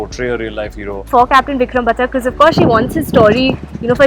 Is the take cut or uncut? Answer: cut